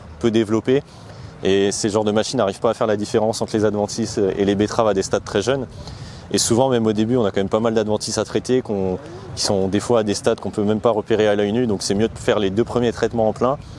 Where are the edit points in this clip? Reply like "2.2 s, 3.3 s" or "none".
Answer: none